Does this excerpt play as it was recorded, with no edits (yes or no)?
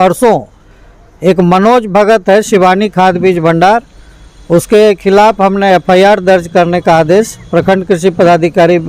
yes